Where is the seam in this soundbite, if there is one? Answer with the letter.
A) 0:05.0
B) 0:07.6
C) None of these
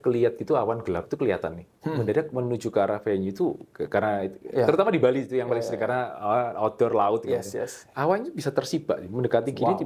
C